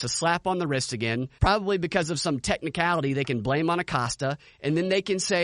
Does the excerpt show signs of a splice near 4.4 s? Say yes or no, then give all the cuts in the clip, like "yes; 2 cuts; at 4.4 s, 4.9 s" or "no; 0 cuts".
no; 1 cut; at 1.3 s